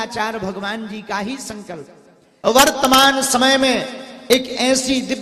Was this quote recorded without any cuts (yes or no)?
no